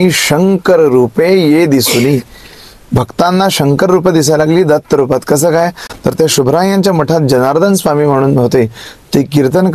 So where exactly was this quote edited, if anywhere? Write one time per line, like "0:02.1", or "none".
none